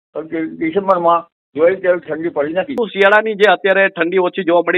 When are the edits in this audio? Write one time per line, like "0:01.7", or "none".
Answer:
0:02.8